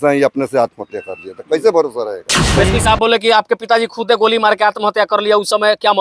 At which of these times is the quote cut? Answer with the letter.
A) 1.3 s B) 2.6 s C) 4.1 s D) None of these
B